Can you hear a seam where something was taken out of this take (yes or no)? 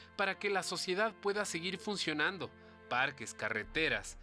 no